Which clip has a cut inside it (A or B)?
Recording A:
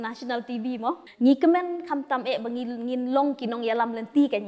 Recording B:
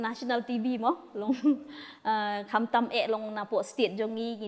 A